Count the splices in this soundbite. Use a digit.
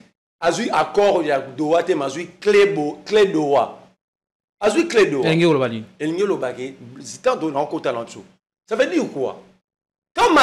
0